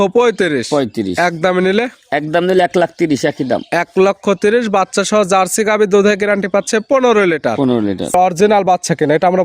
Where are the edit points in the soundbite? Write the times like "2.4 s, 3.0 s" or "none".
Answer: 8.1 s